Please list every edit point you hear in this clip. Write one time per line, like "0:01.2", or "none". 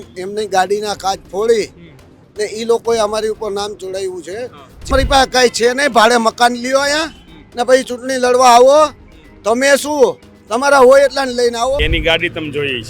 0:04.9
0:11.8